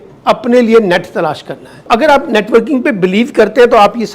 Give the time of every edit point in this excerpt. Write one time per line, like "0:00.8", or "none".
0:01.9